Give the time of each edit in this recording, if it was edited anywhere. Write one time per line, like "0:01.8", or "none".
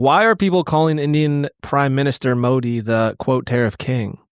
none